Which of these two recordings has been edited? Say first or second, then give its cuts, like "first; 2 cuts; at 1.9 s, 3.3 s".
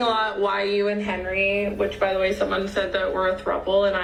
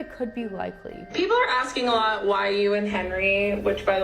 second; 1 cut; at 0.9 s